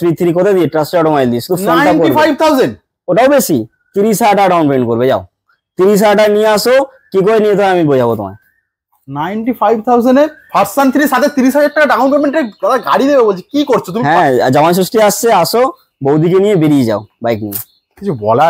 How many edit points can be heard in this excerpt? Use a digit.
0